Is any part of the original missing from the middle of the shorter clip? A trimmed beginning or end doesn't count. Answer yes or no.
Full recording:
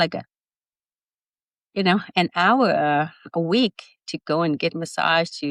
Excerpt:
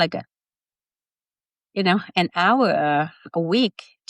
no